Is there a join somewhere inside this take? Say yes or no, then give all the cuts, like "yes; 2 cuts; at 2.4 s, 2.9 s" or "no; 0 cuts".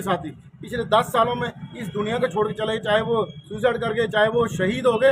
no; 0 cuts